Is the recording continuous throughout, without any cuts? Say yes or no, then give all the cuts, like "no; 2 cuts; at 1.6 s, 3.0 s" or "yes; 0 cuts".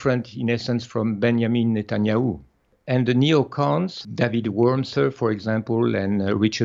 no; 1 cut; at 2.7 s